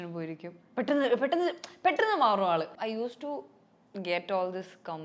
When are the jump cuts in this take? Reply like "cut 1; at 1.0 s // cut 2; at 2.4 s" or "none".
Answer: cut 1; at 2.8 s